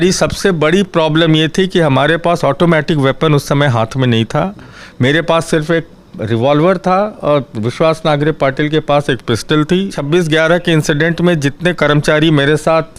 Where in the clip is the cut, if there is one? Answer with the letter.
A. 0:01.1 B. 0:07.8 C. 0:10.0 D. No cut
C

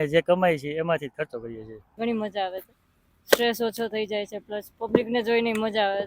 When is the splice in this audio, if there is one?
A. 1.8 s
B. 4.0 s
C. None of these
A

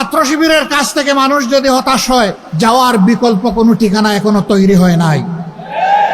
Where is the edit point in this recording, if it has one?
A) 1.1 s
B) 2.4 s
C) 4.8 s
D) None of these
B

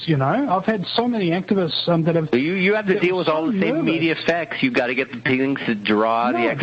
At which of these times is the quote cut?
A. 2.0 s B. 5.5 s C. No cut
A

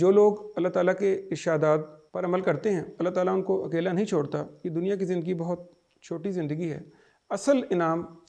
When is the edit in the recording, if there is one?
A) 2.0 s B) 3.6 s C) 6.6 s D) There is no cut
A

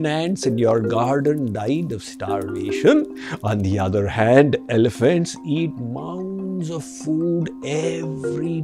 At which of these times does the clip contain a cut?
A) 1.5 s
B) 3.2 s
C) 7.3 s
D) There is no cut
B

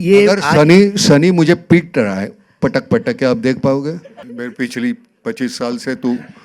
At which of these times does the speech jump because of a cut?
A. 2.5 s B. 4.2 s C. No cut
B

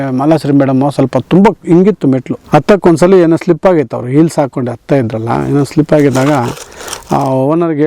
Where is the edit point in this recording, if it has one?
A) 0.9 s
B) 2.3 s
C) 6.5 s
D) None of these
B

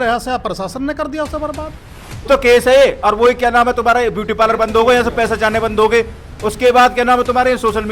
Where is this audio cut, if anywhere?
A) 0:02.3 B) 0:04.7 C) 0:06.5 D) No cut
A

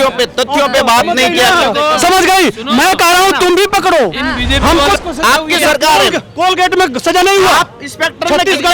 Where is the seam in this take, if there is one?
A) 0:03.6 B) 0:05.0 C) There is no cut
B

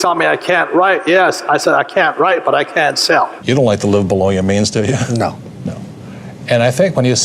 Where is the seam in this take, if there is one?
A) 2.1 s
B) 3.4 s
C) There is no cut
B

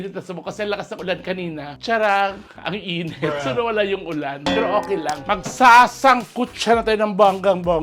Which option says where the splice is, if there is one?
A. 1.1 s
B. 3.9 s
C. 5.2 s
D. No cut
C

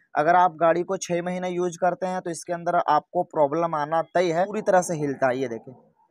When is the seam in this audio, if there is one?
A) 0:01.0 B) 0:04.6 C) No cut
B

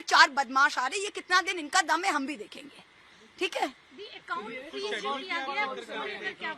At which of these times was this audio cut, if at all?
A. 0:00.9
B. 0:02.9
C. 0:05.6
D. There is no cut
D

